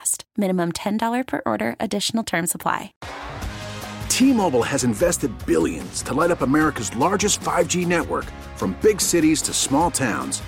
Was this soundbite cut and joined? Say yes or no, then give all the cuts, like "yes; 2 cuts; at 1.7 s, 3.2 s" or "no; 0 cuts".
yes; 1 cut; at 3.0 s